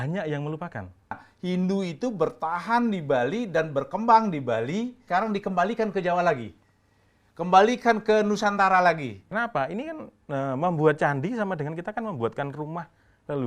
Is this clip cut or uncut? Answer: cut